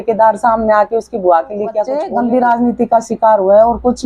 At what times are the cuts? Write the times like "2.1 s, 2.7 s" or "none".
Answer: 1.9 s